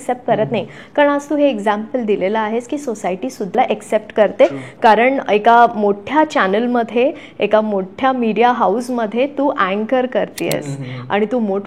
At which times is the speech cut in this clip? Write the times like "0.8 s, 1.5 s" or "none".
3.6 s